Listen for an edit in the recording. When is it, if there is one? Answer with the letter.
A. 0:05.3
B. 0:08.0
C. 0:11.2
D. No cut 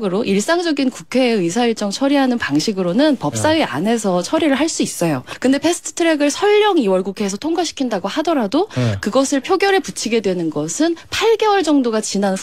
A